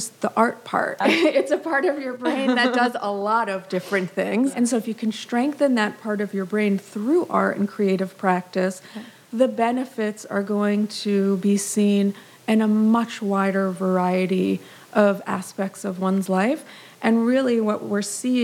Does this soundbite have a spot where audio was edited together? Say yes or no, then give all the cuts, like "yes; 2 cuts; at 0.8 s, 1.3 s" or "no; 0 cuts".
yes; 2 cuts; at 1.0 s, 4.5 s